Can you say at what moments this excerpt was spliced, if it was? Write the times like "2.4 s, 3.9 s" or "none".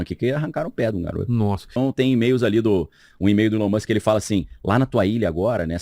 1.7 s